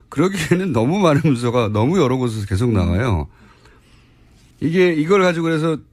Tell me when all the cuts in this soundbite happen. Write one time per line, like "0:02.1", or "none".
0:03.2